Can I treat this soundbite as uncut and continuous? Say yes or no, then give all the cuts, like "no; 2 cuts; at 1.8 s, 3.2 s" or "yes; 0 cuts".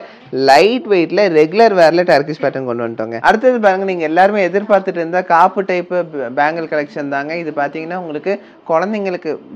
no; 1 cut; at 3.2 s